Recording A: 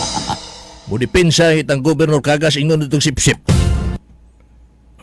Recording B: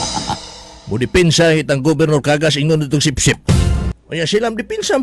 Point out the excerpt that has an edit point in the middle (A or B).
B